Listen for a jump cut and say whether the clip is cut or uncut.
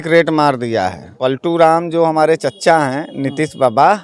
cut